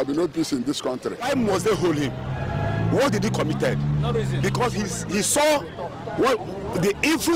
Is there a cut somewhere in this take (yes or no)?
yes